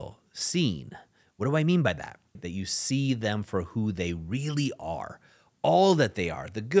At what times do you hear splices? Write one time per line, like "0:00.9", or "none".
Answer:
0:02.4